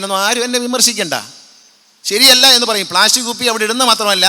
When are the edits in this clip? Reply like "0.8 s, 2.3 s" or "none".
none

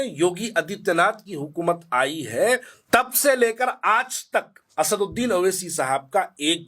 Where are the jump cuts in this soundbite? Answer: 2.7 s, 4.6 s

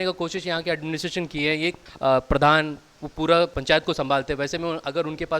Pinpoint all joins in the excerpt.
1.9 s, 3.6 s

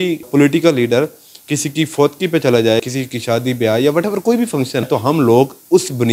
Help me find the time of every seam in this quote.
2.9 s, 4.9 s

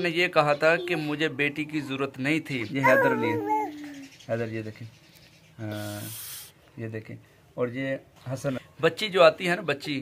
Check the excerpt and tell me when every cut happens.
2.6 s, 8.7 s

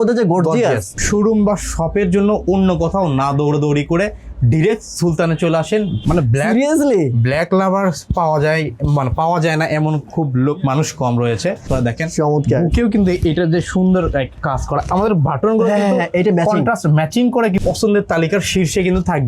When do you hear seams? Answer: 0.9 s, 6.1 s, 11.6 s, 17.6 s

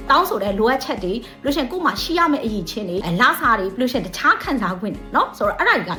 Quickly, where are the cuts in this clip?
none

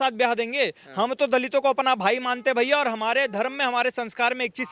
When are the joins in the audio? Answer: none

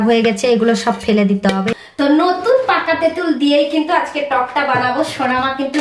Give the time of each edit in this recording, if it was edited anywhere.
1.7 s

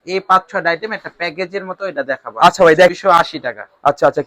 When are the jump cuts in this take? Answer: 2.9 s

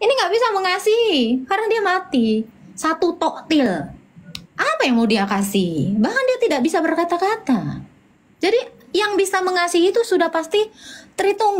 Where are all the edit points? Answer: none

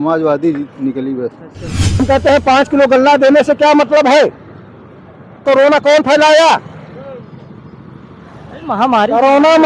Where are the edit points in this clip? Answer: 2.0 s, 5.4 s

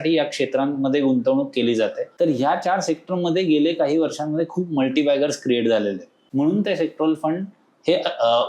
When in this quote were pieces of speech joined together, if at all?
2.0 s, 6.2 s

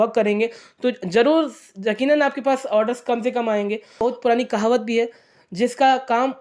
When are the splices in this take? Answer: 4.0 s

